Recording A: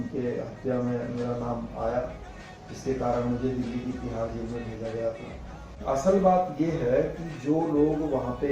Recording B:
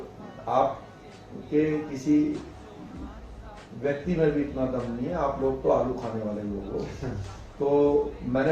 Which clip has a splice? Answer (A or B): A